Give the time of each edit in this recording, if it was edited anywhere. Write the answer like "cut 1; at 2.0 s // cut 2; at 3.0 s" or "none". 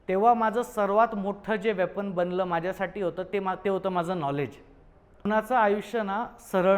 cut 1; at 5.3 s